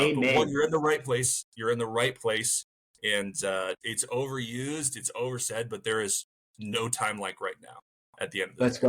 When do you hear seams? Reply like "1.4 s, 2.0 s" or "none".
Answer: 3.8 s